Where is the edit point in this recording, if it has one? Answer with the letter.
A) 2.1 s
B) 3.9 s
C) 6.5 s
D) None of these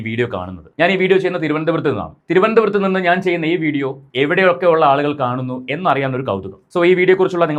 D